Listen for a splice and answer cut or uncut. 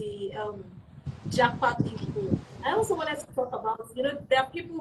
uncut